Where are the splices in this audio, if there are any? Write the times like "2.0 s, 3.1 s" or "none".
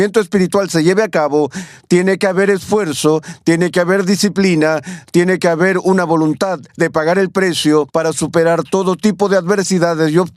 7.9 s